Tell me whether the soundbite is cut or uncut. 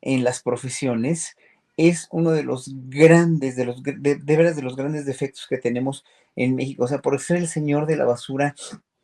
uncut